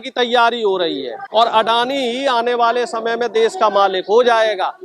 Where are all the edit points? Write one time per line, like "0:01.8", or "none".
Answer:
0:01.2